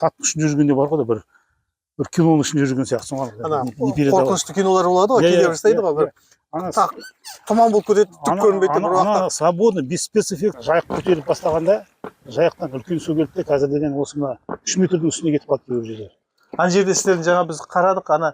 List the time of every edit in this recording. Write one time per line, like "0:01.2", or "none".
0:10.6